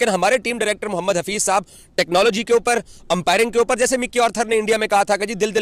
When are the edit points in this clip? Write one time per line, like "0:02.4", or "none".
none